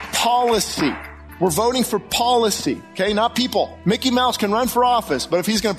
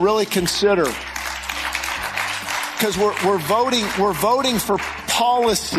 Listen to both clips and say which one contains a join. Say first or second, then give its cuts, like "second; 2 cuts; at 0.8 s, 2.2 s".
first; 2 cuts; at 2.9 s, 3.8 s